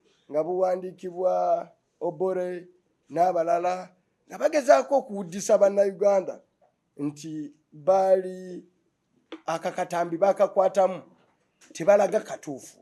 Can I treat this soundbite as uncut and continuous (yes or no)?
yes